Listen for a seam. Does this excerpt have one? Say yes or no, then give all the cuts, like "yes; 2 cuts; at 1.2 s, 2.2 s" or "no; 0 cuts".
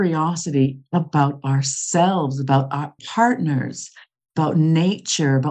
yes; 1 cut; at 3.0 s